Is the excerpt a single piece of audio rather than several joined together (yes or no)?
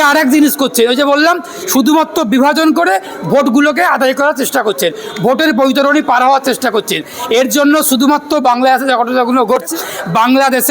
no